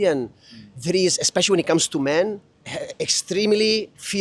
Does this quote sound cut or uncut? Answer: cut